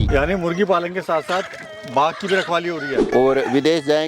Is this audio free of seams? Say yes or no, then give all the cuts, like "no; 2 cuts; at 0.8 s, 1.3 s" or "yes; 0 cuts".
no; 1 cut; at 3.0 s